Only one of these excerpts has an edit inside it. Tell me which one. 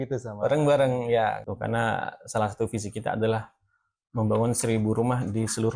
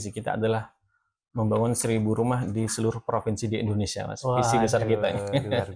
first; 1 cut; at 1.4 s

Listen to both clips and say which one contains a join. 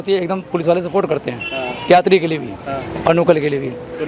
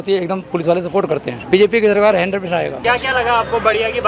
second; 2 cuts; at 1.3 s, 2.8 s

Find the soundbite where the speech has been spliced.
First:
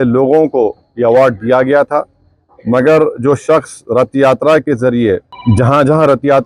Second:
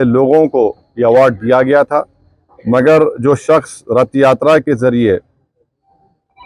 first; 1 cut; at 5.3 s

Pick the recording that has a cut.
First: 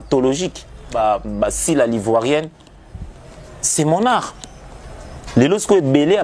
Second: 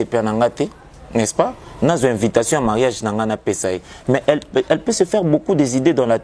first; 1 cut; at 0.9 s

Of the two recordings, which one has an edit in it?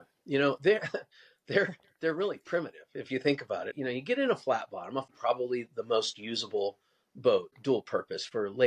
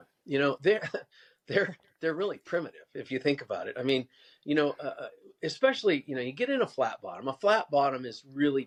first; 3 cuts; at 3.7 s, 5.1 s, 7.5 s

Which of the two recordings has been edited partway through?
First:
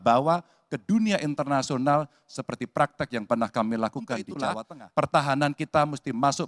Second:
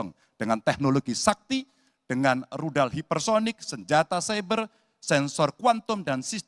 first; 1 cut; at 4.3 s

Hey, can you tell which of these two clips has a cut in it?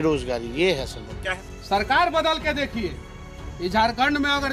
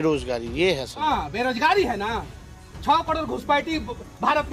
second; 1 cut; at 1.0 s

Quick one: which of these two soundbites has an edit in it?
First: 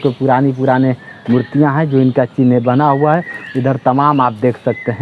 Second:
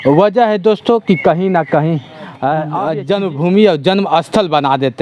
second; 1 cut; at 2.8 s

